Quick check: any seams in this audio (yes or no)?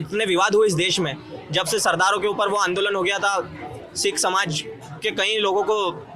no